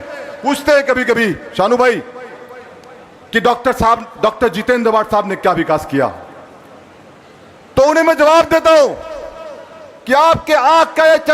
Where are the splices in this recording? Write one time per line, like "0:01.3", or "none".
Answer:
none